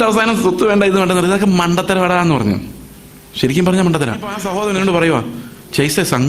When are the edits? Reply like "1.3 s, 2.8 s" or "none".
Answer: 4.4 s